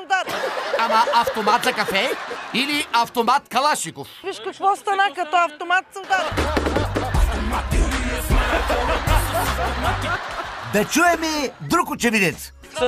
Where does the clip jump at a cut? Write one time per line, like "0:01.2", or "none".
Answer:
0:10.3